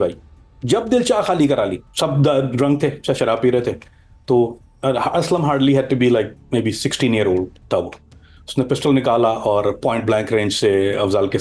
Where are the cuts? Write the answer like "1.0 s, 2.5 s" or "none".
1.9 s